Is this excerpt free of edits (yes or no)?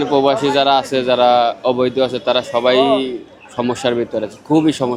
yes